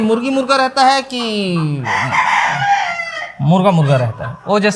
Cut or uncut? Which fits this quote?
uncut